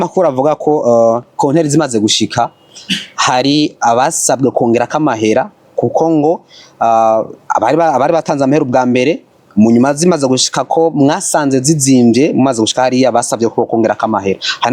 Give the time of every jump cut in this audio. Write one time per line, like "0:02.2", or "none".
none